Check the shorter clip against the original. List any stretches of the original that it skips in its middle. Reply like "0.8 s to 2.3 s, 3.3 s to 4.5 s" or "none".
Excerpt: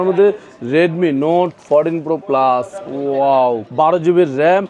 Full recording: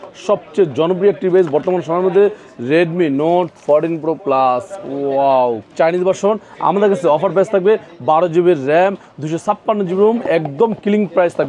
5.6 s to 7.9 s

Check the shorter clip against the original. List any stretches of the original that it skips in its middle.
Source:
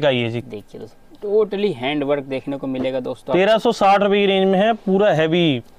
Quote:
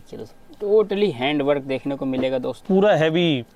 3.2 s to 4.8 s

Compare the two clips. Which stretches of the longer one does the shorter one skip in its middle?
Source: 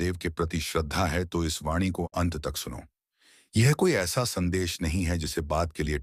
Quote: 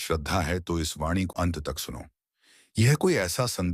1.9 s to 2.1 s

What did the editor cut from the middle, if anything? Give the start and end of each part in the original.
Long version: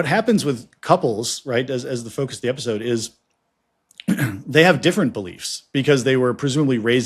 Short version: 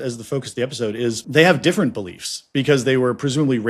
3.1 s to 4.4 s

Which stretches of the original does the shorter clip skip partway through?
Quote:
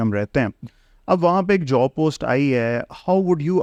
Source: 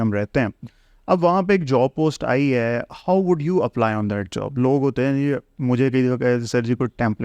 none

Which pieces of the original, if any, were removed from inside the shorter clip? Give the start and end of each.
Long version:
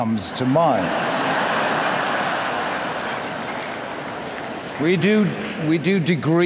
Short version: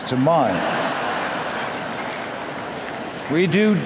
1.2 s to 2.4 s

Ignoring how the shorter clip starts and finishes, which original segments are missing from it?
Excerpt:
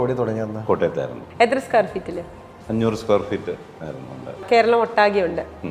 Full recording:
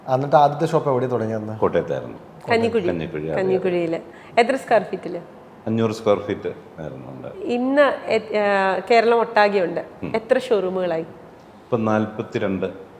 2.1 s to 4.2 s, 7.4 s to 8.8 s

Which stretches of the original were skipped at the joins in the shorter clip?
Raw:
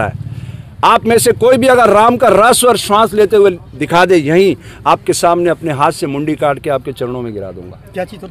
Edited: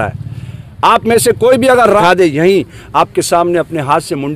2.0 s to 3.9 s

